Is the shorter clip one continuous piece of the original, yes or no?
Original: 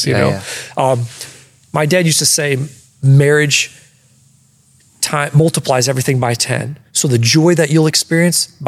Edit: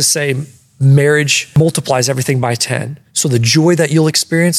no